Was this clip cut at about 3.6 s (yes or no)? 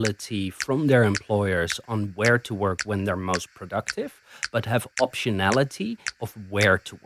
no